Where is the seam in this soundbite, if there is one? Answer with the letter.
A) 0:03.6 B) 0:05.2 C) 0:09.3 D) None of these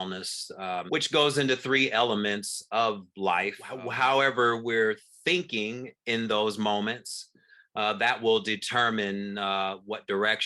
A